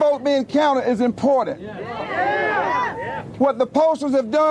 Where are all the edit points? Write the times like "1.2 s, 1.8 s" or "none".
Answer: none